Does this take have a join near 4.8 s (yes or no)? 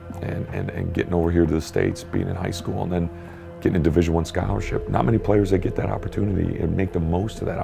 yes